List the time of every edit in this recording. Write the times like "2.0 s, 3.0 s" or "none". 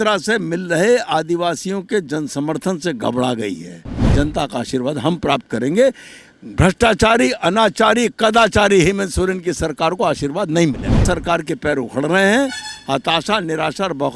4.1 s, 11.0 s